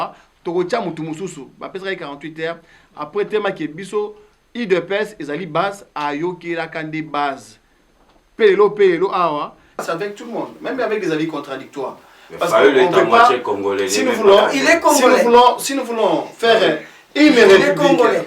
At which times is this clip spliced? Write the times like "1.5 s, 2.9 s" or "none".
9.8 s